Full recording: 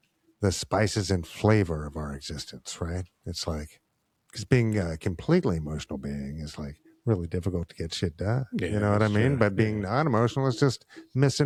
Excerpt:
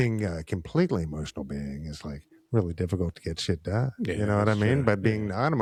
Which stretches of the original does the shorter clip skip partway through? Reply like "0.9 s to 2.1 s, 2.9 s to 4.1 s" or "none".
none